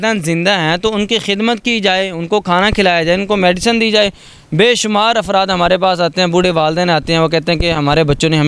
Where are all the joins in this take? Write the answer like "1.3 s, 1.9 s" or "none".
none